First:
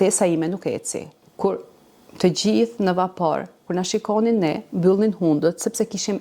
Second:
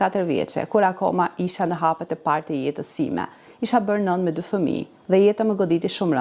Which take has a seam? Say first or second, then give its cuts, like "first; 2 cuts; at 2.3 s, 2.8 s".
first; 1 cut; at 1.2 s